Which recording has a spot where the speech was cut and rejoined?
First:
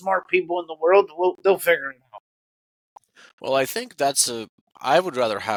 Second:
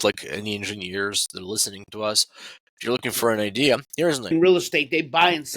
second; 1 cut; at 4.3 s

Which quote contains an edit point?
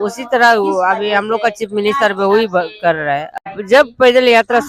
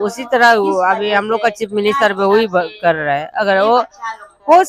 first; 1 cut; at 3.5 s

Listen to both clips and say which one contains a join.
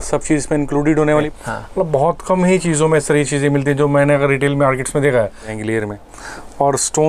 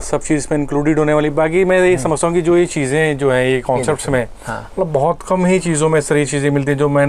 first; 2 cuts; at 1.3 s, 5.5 s

